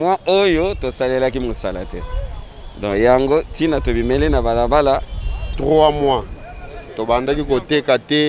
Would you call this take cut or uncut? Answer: cut